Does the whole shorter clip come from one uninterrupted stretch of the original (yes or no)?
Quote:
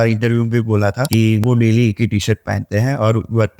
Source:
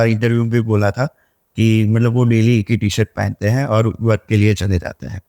no